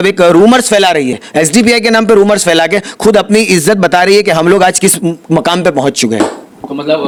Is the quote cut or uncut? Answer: uncut